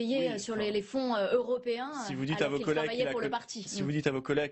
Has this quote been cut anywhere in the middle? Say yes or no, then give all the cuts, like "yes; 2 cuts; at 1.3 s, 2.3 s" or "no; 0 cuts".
yes; 1 cut; at 2.6 s